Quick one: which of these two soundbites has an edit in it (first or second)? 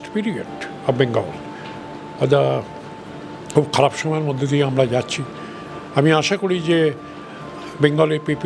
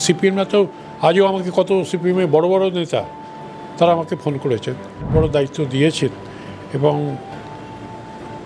second